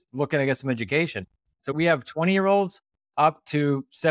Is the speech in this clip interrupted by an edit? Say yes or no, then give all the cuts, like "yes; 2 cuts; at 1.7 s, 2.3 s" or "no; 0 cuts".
yes; 1 cut; at 1.7 s